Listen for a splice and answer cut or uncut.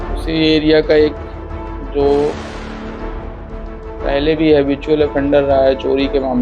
cut